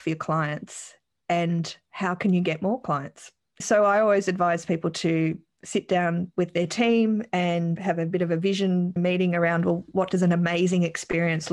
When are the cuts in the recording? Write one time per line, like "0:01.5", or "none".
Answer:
0:03.6
0:07.8
0:09.0
0:09.9